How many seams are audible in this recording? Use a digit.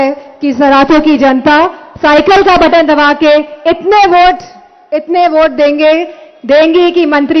0